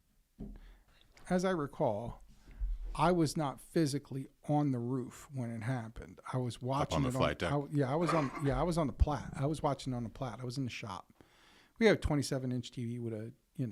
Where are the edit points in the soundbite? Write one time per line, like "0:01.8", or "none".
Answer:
0:00.9